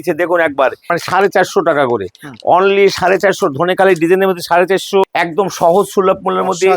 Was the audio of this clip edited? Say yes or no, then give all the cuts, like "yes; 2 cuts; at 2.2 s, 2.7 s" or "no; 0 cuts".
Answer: yes; 2 cuts; at 0.9 s, 5.0 s